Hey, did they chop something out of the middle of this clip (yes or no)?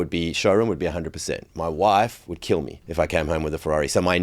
yes